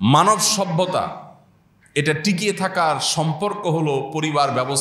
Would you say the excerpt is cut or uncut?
uncut